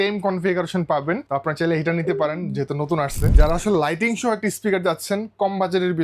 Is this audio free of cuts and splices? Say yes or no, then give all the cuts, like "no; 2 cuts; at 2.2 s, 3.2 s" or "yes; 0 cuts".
no; 2 cuts; at 1.2 s, 3.4 s